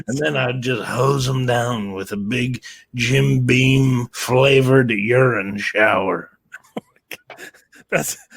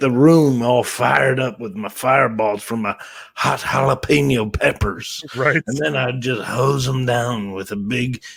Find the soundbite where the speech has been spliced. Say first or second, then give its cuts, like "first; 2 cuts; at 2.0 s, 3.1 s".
first; 1 cut; at 4.1 s